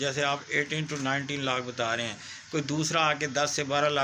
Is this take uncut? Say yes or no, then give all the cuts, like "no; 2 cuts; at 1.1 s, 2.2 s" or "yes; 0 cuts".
yes; 0 cuts